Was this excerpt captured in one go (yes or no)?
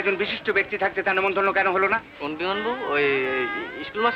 yes